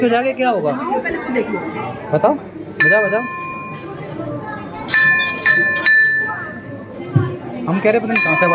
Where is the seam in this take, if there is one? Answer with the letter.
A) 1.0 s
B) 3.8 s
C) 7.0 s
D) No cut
D